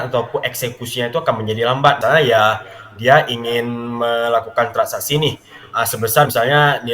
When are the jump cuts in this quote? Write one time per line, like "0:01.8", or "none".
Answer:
0:02.0